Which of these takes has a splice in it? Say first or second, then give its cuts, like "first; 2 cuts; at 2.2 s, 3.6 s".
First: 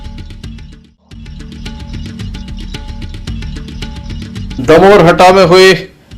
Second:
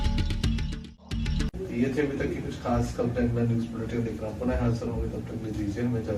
first; 2 cuts; at 1.3 s, 3.2 s